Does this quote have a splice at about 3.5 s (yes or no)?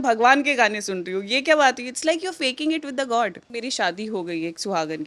yes